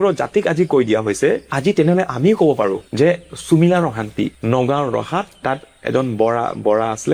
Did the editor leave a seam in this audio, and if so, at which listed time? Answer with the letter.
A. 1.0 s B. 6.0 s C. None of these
C